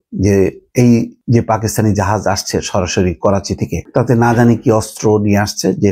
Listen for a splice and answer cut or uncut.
cut